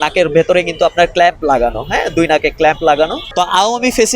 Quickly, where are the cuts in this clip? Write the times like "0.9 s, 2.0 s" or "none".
3.2 s

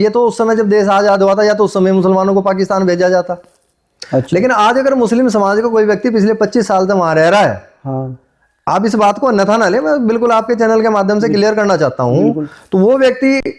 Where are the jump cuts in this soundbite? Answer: none

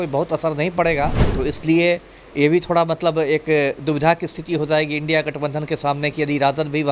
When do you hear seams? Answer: 1.2 s

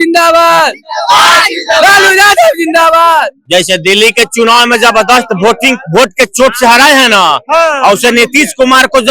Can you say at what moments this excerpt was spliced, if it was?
3.4 s

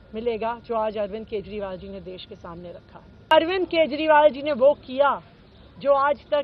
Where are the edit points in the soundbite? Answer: 3.3 s

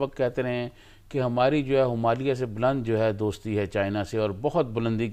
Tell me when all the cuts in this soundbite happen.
none

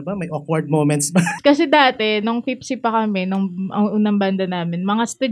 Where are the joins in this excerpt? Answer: 1.4 s

